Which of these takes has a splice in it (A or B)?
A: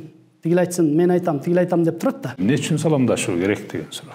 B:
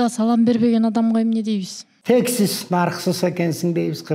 A